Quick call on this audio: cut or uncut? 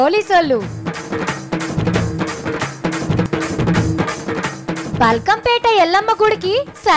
cut